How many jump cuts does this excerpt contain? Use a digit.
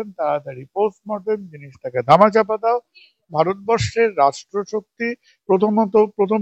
1